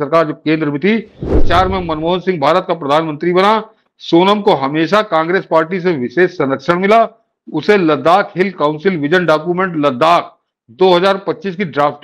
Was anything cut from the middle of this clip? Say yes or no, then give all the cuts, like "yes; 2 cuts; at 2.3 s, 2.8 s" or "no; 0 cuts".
yes; 1 cut; at 1.4 s